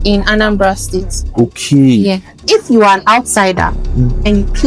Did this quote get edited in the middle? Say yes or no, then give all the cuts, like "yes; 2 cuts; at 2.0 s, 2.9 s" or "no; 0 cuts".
yes; 1 cut; at 2.4 s